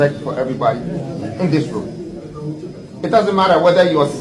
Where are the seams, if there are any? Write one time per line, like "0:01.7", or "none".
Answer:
none

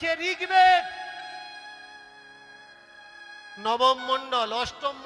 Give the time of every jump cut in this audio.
none

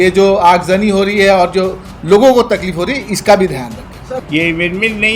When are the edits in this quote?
0:04.2

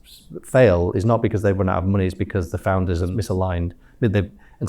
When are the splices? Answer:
0:03.1

